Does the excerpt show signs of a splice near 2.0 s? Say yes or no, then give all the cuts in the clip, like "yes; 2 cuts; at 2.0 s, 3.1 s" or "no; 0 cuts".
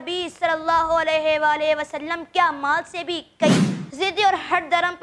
no; 1 cut; at 3.6 s